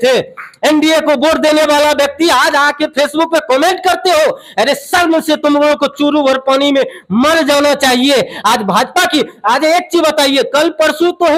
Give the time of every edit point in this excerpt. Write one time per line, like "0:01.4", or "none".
none